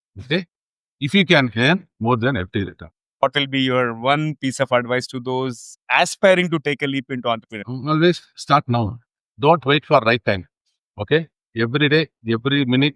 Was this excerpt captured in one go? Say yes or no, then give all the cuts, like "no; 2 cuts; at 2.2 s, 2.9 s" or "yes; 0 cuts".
no; 2 cuts; at 3.2 s, 7.8 s